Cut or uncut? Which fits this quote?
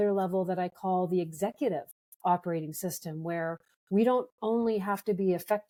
uncut